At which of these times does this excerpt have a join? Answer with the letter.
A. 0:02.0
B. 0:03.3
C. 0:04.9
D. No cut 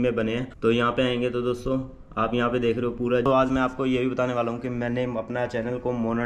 B